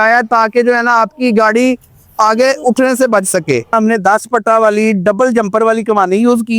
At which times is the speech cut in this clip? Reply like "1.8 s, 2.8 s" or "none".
3.7 s